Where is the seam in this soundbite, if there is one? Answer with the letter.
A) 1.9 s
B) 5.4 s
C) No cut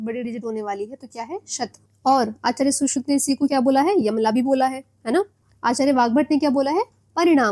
A